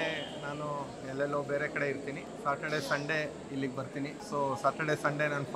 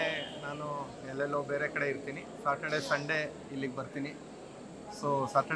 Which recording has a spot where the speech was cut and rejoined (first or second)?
first